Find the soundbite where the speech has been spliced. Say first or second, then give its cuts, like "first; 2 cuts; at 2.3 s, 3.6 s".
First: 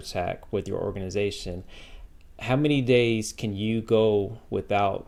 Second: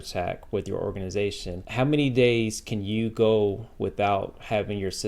second; 1 cut; at 1.5 s